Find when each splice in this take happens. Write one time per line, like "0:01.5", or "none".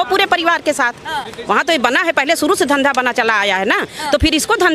none